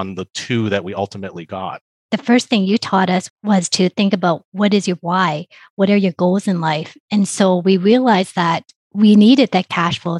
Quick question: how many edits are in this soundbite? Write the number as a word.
two